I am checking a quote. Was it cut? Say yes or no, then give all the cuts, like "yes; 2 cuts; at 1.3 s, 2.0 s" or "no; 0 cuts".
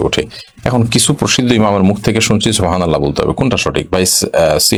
no; 0 cuts